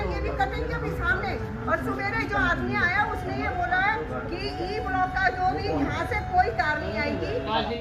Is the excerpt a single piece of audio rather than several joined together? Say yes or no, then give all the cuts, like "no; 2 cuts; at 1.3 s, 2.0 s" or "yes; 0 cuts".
yes; 0 cuts